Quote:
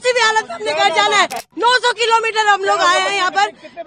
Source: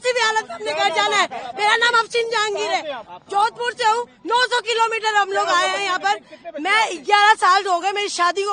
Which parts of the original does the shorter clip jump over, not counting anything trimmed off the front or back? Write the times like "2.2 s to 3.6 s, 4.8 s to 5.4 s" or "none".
1.5 s to 4.1 s

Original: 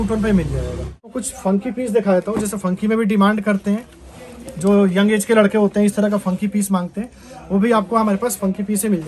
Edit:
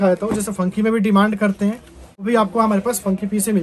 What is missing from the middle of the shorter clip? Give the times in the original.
4.3 s to 7.6 s

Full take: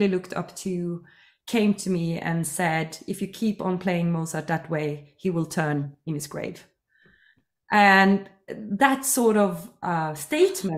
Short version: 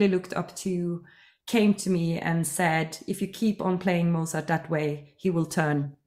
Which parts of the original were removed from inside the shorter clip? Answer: none

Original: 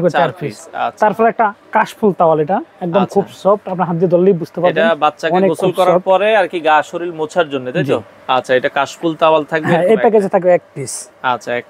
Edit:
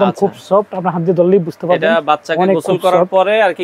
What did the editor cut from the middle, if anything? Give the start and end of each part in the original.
none

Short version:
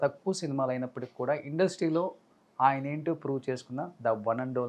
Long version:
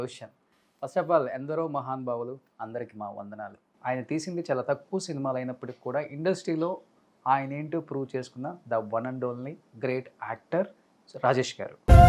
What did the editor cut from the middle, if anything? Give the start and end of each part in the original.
none

